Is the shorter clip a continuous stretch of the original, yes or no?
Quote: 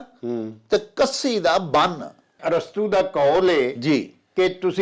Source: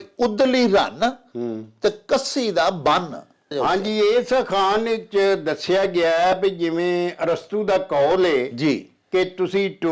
no